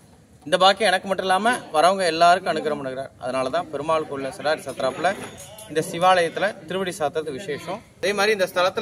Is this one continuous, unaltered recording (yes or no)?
no